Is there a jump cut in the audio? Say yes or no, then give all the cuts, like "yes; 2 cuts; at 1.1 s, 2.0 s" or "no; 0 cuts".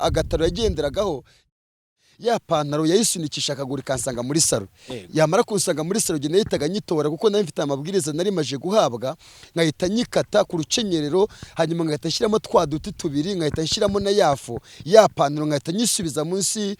yes; 1 cut; at 1.5 s